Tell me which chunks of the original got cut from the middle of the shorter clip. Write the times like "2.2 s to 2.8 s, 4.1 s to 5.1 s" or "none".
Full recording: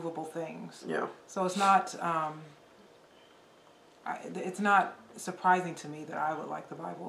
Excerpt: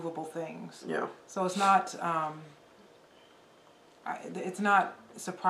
none